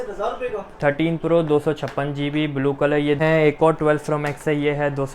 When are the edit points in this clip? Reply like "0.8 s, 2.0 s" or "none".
3.2 s